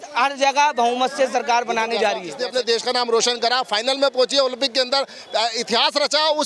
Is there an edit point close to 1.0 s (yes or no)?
no